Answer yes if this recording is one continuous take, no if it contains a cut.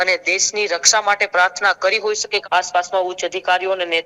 no